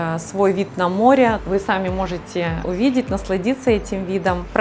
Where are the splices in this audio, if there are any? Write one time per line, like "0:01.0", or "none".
0:01.4
0:02.6